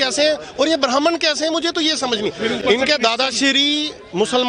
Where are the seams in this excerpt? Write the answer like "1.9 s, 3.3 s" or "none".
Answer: none